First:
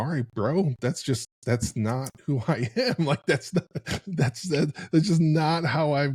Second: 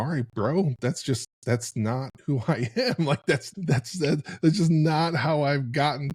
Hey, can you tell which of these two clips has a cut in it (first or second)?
second